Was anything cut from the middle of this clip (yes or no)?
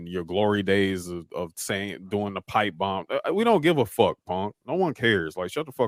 no